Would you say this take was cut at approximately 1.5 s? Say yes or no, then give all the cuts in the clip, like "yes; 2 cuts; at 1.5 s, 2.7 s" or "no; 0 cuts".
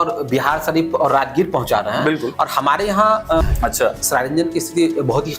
no; 1 cut; at 3.4 s